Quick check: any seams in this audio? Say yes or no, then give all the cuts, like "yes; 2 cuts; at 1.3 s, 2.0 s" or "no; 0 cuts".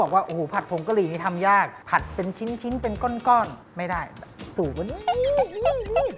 no; 0 cuts